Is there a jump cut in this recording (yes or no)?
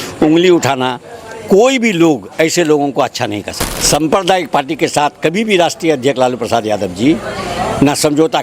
yes